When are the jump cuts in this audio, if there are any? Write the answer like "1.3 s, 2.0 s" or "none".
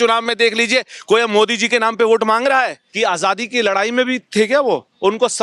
2.8 s